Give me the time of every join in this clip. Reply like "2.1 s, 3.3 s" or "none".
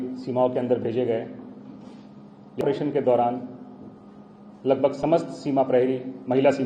2.6 s